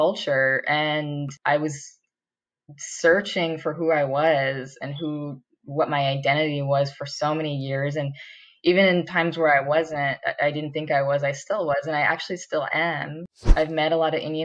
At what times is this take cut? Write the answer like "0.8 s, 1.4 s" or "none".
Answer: 1.3 s, 13.4 s